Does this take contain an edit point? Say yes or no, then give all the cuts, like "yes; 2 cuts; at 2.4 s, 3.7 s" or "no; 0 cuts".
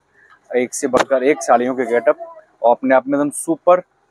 no; 0 cuts